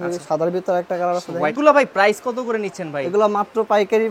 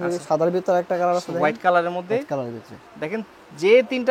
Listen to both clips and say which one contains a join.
first; 1 cut; at 1.6 s

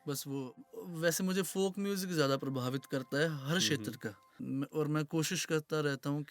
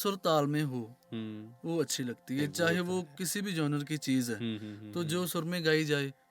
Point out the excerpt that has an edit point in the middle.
first; 1 cut; at 4.4 s

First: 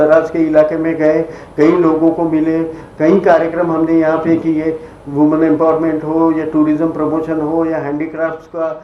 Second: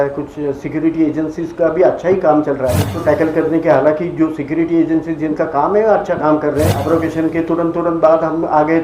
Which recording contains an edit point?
second; 2 cuts; at 2.9 s, 6.8 s

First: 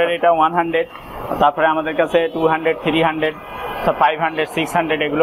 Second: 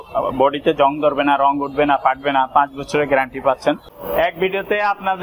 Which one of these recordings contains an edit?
second; 1 cut; at 3.9 s

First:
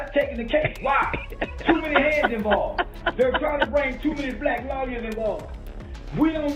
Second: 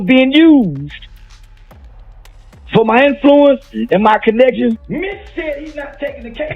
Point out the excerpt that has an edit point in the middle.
second; 3 cuts; at 0.9 s, 2.7 s, 4.8 s

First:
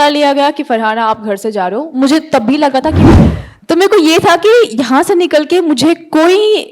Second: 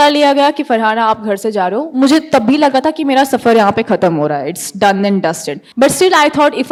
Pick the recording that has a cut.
first; 1 cut; at 3.1 s

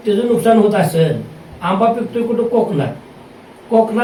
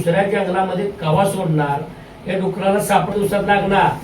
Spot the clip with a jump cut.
second; 1 cut; at 3.1 s

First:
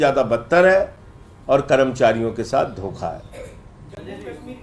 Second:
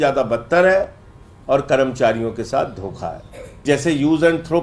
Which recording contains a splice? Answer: second; 1 cut; at 3.6 s

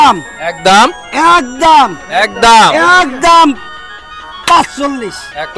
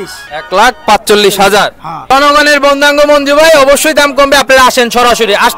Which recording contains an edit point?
second; 1 cut; at 2.1 s

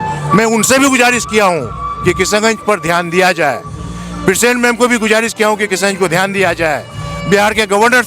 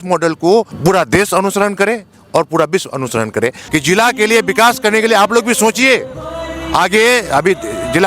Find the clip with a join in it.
second; 1 cut; at 3.6 s

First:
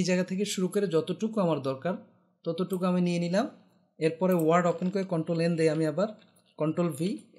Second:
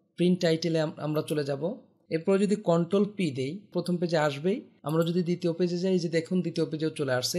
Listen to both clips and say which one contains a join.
second; 3 cuts; at 1.9 s, 3.7 s, 4.7 s

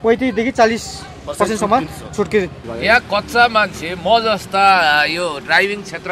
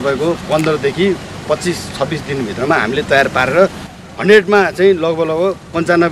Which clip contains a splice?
first; 1 cut; at 2.6 s

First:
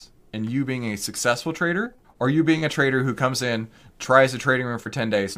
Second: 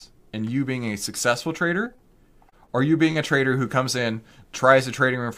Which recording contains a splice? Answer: first; 1 cut; at 2.0 s

